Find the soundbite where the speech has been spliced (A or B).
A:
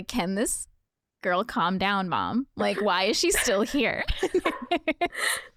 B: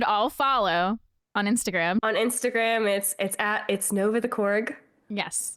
B